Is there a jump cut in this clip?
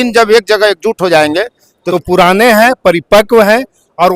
yes; 1 cut; at 1.8 s

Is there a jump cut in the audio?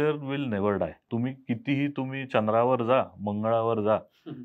yes; 1 cut; at 1.0 s

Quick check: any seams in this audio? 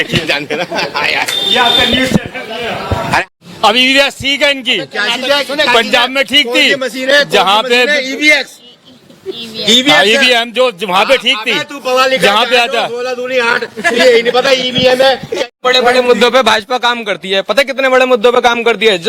yes; 2 cuts; at 3.2 s, 15.4 s

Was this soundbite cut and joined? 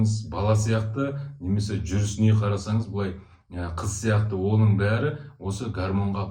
no; 0 cuts

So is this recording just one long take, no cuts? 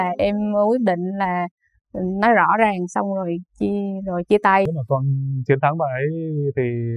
no; 1 cut; at 4.7 s

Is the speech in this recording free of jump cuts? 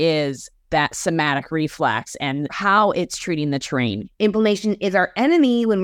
no; 2 cuts; at 2.5 s, 4.0 s

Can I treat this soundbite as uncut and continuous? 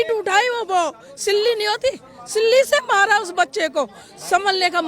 yes; 0 cuts

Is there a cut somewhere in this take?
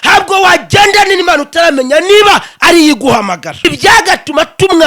yes; 1 cut; at 3.7 s

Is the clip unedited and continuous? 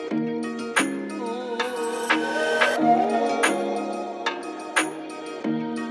yes; 0 cuts

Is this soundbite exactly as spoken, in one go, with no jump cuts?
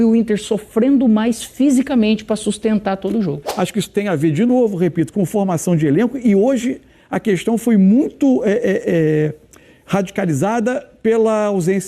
no; 1 cut; at 3.4 s

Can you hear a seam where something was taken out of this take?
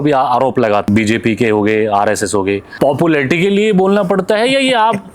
yes; 2 cuts; at 0.9 s, 2.7 s

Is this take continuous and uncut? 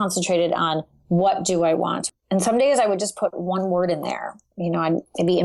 no; 1 cut; at 2.0 s

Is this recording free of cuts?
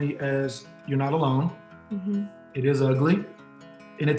yes; 0 cuts

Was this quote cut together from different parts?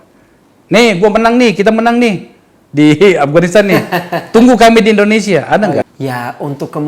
yes; 1 cut; at 5.9 s

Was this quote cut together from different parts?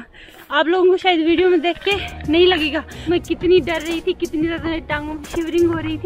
no; 0 cuts

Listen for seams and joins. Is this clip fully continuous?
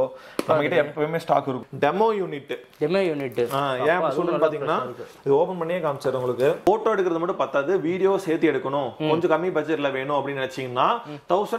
no; 2 cuts; at 1.6 s, 6.6 s

